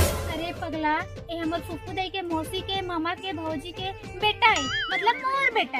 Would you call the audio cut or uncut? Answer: uncut